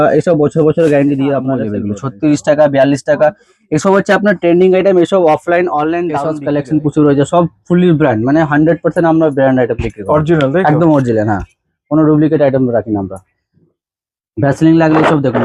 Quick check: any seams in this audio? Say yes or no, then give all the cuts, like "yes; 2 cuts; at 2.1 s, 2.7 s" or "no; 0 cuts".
yes; 2 cuts; at 1.9 s, 6.3 s